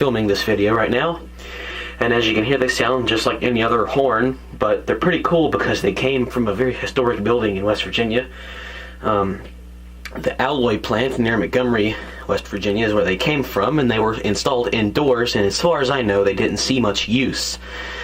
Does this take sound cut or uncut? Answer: cut